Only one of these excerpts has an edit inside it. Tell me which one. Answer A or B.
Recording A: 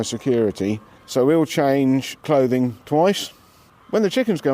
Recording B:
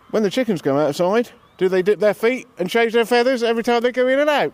A